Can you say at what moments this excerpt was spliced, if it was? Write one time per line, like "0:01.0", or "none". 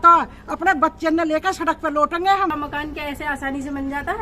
0:02.5